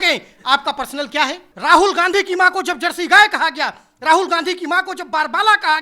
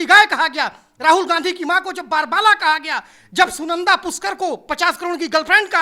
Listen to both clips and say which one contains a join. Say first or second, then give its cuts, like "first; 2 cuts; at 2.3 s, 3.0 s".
first; 1 cut; at 1.5 s